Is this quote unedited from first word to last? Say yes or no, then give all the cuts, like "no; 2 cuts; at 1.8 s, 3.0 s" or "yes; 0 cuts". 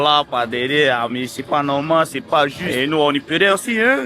no; 1 cut; at 2.6 s